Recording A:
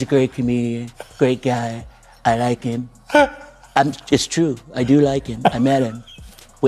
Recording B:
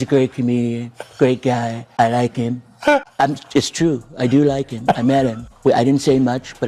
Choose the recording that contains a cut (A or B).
B